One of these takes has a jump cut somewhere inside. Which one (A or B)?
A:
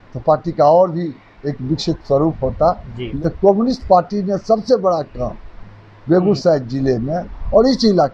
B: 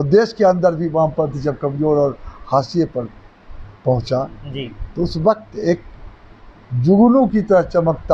A